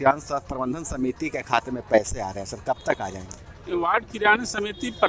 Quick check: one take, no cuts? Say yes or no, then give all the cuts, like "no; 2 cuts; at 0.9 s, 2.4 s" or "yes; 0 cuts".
yes; 0 cuts